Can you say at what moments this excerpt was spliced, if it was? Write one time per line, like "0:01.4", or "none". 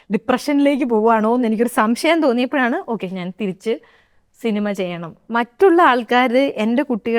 0:05.2